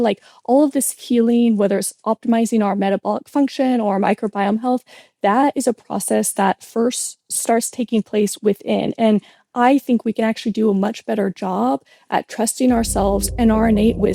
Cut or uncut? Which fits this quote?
uncut